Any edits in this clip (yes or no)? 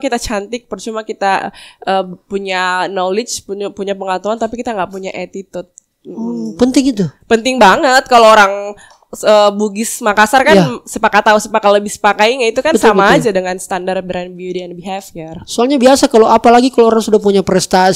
no